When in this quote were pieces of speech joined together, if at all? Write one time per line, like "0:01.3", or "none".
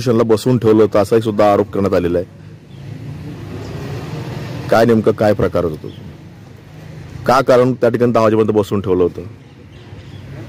none